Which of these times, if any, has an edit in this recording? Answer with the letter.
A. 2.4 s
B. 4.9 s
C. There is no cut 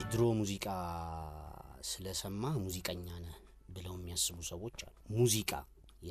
B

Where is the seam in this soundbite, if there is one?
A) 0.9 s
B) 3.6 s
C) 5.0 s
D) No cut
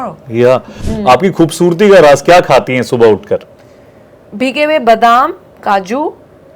A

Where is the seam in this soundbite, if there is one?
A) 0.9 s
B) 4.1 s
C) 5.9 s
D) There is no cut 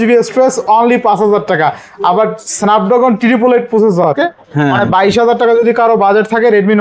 B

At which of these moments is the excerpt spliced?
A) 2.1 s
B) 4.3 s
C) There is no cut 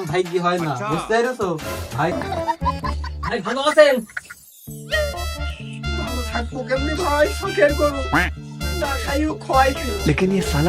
A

